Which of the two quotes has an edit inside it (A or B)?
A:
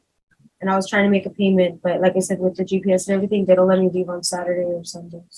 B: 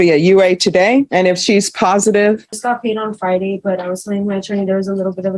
B